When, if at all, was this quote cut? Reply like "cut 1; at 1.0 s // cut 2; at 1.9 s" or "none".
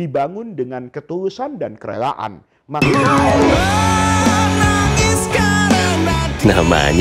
cut 1; at 2.8 s